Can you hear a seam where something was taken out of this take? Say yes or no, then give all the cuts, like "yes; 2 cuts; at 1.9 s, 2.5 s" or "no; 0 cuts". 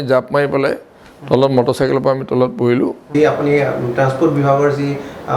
yes; 1 cut; at 3.1 s